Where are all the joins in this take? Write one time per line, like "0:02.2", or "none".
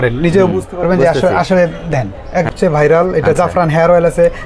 0:02.5